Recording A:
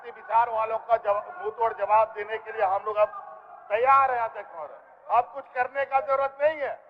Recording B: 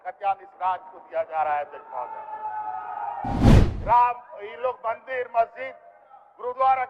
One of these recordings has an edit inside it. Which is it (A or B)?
B